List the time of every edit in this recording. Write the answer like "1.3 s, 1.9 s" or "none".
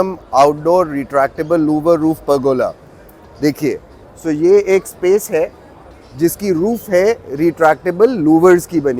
none

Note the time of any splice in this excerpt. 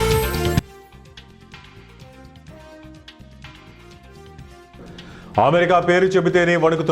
2.9 s

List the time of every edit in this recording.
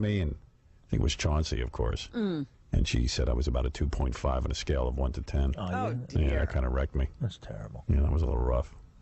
4.7 s

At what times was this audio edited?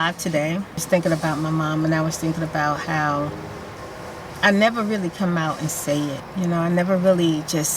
0.8 s, 3.8 s, 6.2 s

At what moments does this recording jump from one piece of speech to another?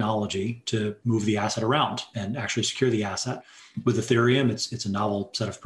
1.0 s, 2.1 s

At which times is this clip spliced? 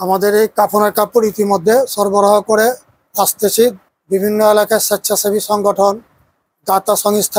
3.9 s

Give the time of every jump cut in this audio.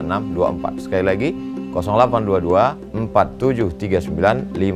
none

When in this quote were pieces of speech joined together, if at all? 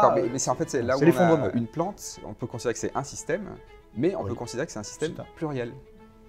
1.5 s

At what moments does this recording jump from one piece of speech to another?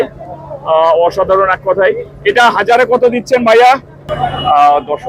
4.0 s

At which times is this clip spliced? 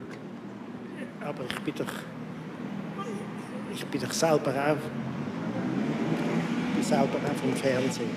none

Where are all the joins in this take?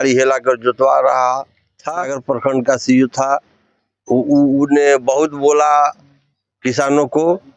2.2 s

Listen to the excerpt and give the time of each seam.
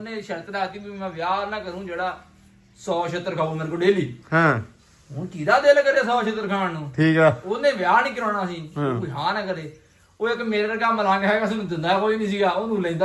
none

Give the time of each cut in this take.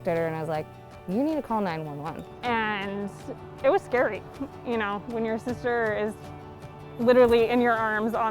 2.3 s

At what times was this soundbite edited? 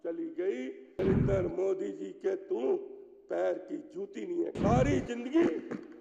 1.0 s, 4.6 s

